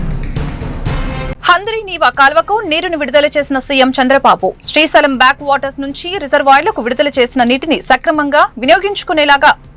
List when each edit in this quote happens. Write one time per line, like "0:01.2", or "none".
0:01.0